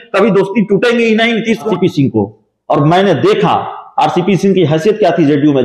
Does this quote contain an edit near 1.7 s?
yes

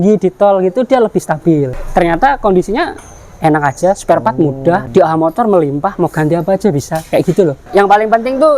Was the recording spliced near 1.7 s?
yes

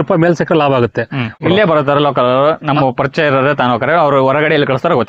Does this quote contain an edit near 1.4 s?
yes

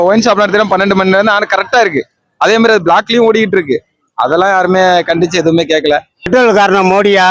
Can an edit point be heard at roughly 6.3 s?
yes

